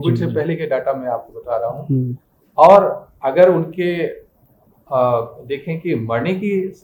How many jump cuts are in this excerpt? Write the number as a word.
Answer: zero